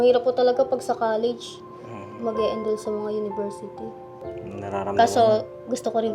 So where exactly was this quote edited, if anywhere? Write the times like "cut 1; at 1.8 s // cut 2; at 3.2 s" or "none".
cut 1; at 4.2 s